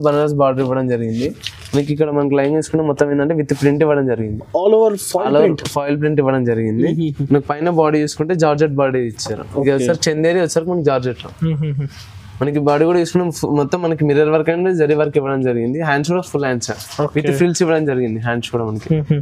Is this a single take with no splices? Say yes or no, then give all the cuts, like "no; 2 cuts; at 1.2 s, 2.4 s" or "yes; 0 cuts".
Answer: yes; 0 cuts